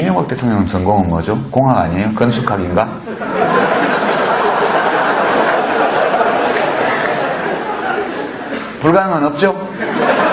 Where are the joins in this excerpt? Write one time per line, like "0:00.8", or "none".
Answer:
none